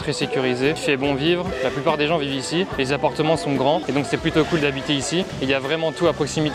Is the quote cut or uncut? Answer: uncut